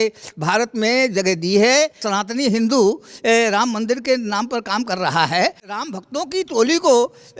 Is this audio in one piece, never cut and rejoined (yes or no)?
no